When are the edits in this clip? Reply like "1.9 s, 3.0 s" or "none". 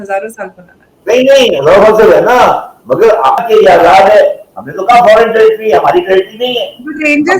3.4 s